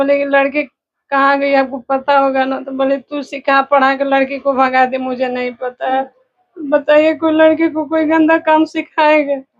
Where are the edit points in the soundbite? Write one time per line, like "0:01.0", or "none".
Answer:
none